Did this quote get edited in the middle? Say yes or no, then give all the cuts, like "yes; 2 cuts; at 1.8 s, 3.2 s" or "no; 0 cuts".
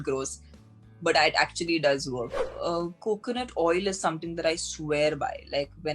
yes; 1 cut; at 2.4 s